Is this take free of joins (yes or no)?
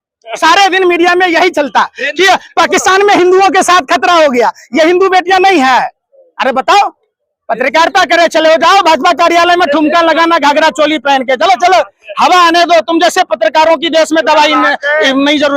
yes